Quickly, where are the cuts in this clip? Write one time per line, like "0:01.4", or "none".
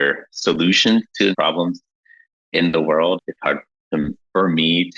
0:01.3
0:03.2